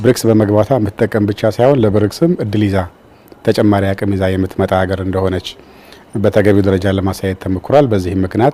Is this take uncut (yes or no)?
yes